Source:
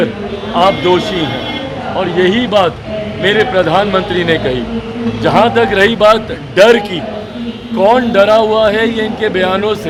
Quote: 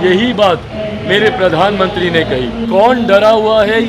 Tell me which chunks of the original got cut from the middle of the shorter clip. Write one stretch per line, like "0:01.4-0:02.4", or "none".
0:04.7-0:07.6